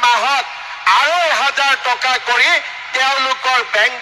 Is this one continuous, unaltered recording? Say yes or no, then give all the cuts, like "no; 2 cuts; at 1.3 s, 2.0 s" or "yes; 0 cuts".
yes; 0 cuts